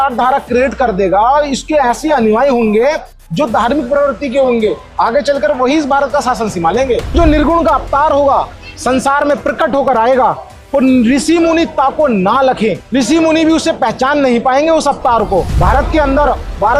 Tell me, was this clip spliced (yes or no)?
yes